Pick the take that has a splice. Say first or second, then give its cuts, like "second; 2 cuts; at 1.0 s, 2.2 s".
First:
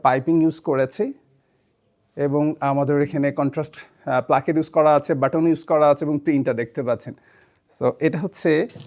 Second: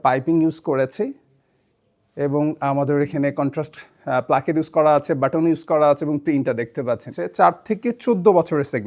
second; 1 cut; at 7.2 s